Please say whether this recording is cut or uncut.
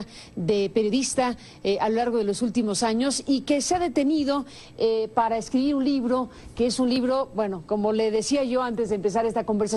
cut